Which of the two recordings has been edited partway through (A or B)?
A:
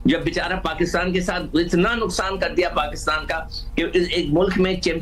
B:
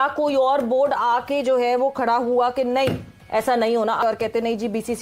B